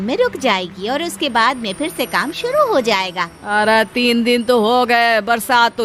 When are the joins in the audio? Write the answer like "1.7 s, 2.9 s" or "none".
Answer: 3.3 s